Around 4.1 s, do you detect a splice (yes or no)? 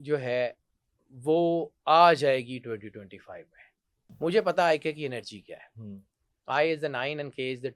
yes